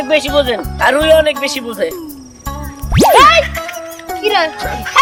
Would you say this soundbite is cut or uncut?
uncut